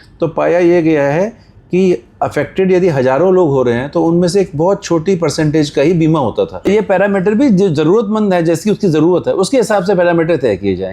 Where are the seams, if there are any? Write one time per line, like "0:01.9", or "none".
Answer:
0:06.7

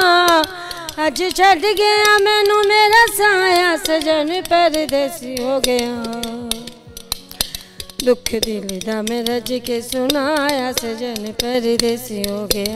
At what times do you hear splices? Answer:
none

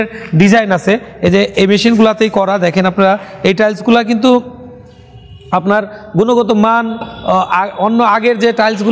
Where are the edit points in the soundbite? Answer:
none

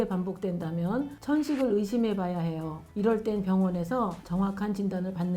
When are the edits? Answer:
0:04.2

